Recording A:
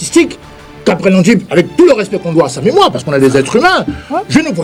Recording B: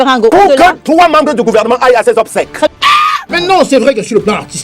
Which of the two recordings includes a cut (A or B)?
B